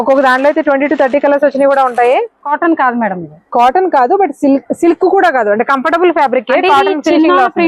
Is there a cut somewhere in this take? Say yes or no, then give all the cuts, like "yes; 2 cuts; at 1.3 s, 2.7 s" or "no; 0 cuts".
yes; 1 cut; at 2.4 s